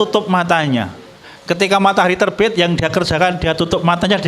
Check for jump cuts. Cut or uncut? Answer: uncut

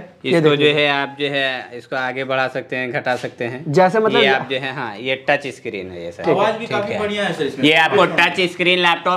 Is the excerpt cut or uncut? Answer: uncut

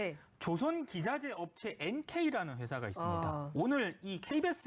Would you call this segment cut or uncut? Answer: uncut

